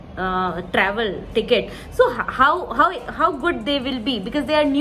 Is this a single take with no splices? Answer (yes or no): yes